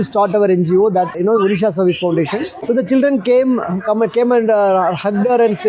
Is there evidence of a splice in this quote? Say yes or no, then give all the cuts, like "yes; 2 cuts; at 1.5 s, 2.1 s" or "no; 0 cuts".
yes; 2 cuts; at 1.1 s, 2.5 s